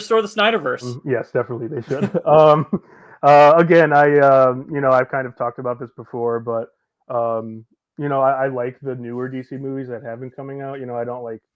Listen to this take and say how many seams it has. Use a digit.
1